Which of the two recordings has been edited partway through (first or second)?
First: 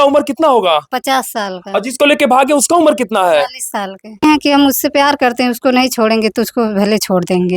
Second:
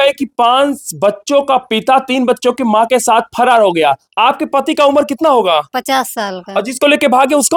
first